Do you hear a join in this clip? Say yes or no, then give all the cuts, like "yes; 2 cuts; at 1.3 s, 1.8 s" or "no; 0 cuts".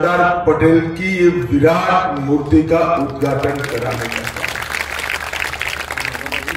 no; 0 cuts